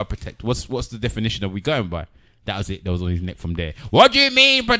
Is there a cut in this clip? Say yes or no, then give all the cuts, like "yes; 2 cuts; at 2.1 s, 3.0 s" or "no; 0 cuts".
no; 0 cuts